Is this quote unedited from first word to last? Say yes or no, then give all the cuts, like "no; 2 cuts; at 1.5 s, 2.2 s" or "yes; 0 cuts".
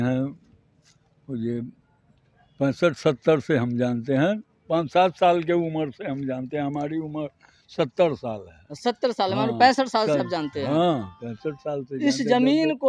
yes; 0 cuts